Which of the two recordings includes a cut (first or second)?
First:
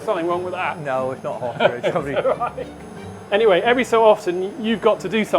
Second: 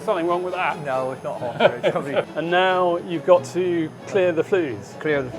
second